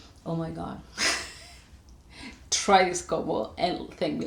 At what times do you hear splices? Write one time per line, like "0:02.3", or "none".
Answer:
none